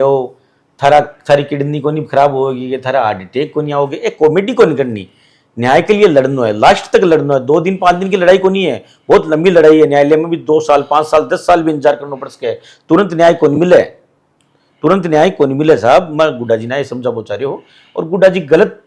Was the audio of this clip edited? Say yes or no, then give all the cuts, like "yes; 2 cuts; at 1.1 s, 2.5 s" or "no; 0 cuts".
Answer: no; 0 cuts